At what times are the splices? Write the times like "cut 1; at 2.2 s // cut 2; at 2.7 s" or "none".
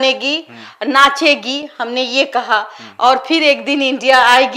none